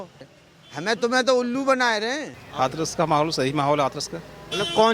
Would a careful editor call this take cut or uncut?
cut